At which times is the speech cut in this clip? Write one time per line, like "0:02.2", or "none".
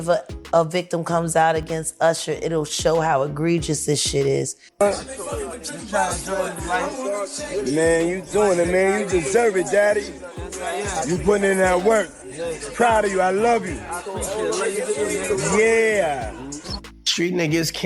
0:03.9
0:04.7